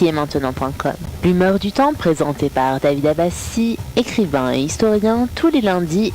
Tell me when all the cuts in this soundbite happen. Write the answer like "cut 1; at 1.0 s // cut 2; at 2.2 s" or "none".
cut 1; at 1.1 s